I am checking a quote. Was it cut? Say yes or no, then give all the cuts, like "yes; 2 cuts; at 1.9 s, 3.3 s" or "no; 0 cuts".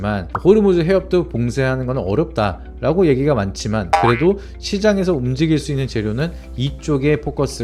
no; 0 cuts